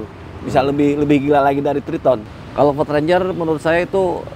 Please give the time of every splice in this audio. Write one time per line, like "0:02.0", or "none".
0:02.4